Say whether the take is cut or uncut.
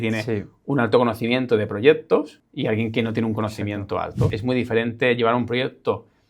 cut